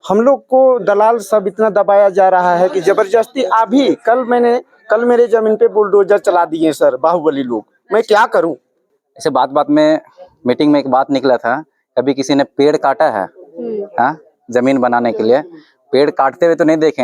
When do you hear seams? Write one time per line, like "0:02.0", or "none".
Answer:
0:08.7